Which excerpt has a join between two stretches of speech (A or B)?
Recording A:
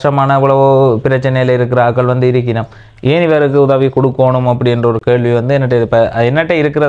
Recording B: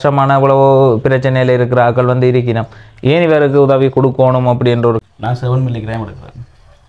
B